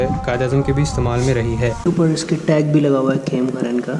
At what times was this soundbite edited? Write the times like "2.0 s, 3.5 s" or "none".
1.8 s